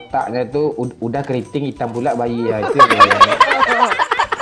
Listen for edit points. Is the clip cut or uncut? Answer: uncut